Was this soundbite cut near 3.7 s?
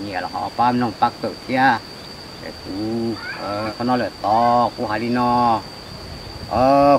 yes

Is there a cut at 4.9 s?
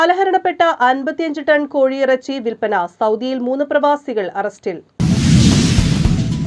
yes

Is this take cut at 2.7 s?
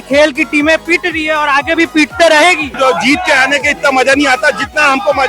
yes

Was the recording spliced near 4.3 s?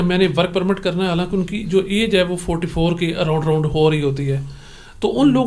no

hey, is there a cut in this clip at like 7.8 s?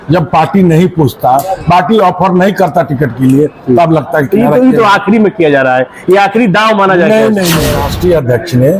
yes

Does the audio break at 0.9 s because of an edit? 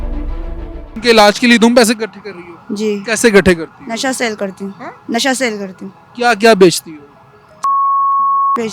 yes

